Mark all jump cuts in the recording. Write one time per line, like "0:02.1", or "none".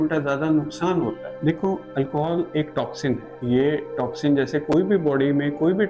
0:01.3